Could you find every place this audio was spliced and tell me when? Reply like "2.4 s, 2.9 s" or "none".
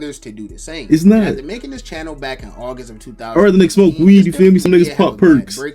4.7 s